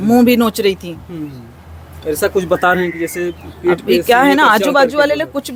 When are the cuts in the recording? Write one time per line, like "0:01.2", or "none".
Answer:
none

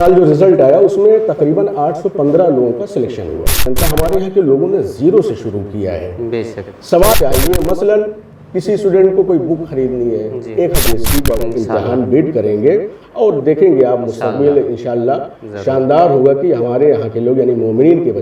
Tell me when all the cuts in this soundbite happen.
0:03.6
0:07.1
0:10.8

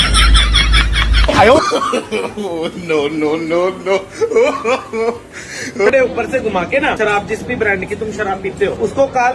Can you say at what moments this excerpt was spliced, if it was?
none

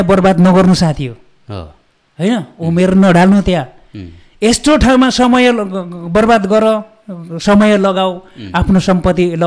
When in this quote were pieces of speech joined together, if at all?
none

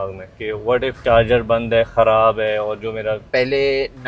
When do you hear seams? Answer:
0:01.0
0:03.3

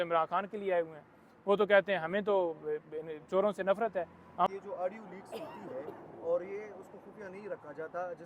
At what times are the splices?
0:04.5

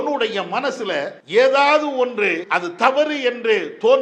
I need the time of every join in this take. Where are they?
0:01.2
0:02.9

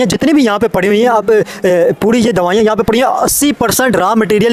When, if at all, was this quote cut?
none

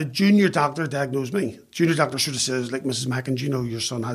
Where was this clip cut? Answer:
none

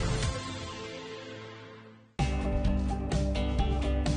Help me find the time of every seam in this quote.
0:02.0

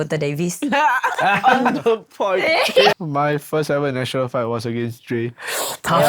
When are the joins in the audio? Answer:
0:02.9

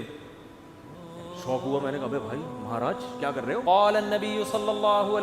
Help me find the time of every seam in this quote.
0:03.6

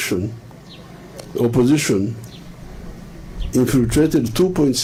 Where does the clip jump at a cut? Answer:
none

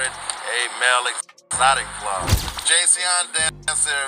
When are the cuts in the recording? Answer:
0:02.4

